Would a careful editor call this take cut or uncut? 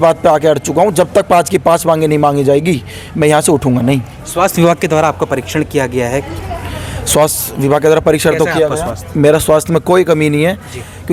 uncut